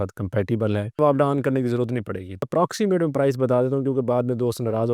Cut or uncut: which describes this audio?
cut